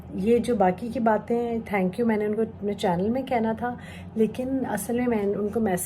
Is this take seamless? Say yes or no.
yes